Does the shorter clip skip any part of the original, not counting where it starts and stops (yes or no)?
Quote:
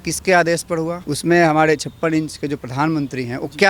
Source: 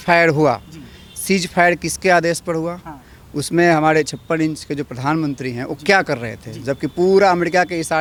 yes